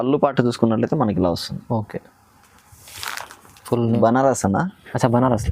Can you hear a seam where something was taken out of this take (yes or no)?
yes